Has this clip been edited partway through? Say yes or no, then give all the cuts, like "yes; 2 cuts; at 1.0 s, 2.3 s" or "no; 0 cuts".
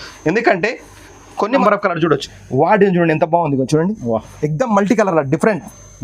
yes; 1 cut; at 1.6 s